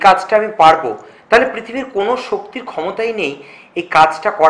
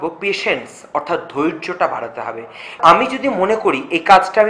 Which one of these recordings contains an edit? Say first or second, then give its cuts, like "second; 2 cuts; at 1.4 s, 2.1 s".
second; 1 cut; at 2.8 s